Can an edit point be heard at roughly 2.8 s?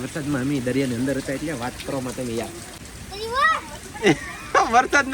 yes; 1 cut; at 2.8 s

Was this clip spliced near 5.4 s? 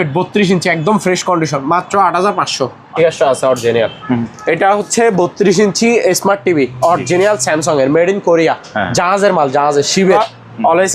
no; 2 cuts; at 2.9 s, 10.2 s

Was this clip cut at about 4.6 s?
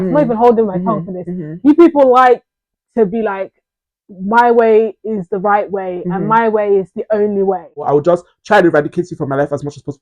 no; 1 cut; at 7.9 s

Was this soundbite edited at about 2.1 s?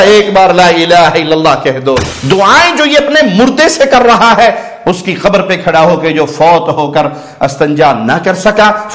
yes; 1 cut; at 2.1 s

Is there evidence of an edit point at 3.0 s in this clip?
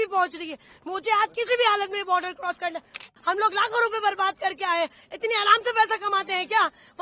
yes; 1 cut; at 3.0 s

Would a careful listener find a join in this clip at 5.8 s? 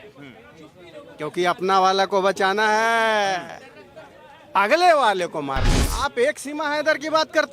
yes; 1 cut; at 5.8 s

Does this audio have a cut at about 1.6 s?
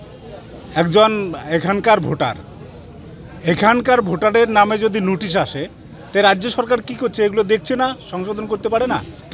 no; 0 cuts

